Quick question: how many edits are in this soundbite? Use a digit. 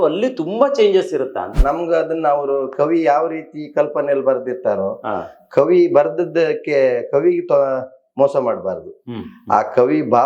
1